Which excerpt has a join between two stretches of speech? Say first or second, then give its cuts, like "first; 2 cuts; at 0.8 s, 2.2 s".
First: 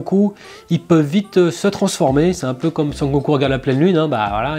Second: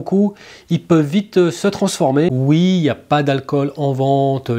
second; 1 cut; at 2.3 s